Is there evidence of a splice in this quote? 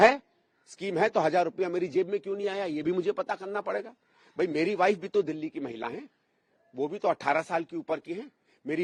no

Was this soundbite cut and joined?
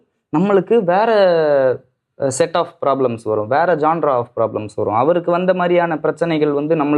no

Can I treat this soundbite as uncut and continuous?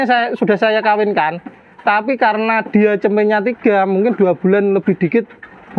yes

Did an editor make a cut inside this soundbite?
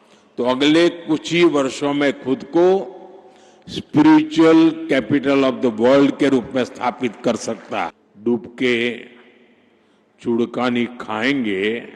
yes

